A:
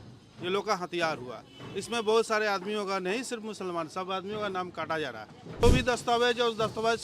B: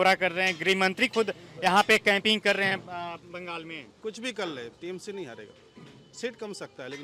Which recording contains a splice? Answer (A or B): A